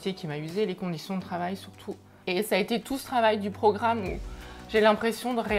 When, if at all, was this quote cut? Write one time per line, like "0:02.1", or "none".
0:02.2